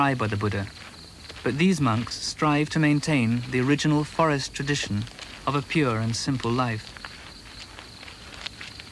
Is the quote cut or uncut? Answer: cut